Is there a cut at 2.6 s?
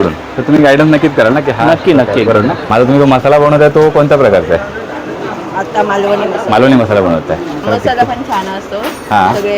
yes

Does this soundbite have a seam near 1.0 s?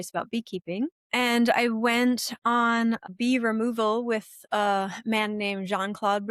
yes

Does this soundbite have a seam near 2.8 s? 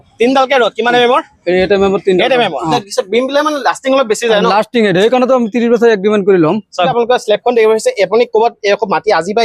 yes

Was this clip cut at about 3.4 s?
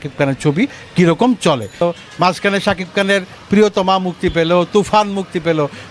no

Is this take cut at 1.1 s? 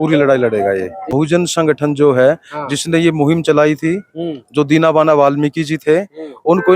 yes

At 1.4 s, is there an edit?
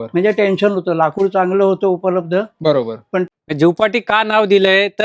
no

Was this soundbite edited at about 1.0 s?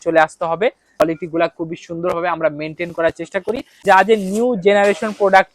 yes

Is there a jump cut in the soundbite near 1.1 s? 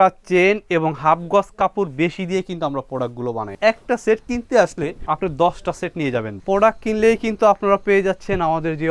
no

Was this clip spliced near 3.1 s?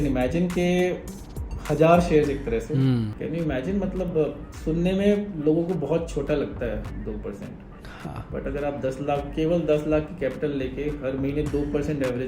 yes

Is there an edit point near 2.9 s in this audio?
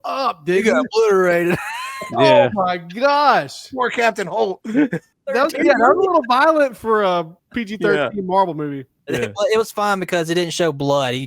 no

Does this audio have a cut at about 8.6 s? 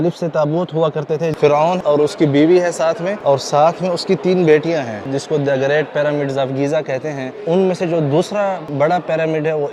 yes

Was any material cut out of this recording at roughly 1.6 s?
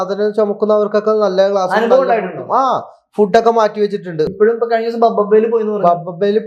no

